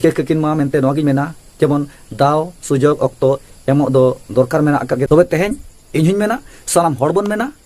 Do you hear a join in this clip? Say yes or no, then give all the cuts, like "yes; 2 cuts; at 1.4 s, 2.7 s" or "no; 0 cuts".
yes; 1 cut; at 5.1 s